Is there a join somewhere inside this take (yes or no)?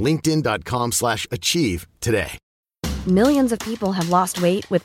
yes